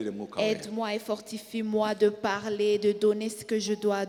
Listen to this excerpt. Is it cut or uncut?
uncut